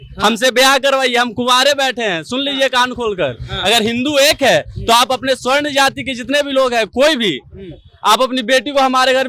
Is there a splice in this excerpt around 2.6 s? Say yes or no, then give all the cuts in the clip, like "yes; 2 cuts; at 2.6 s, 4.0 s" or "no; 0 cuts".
no; 0 cuts